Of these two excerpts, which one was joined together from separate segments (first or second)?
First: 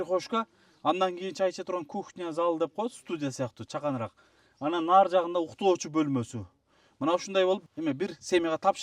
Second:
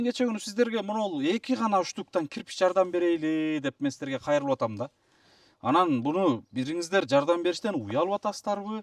first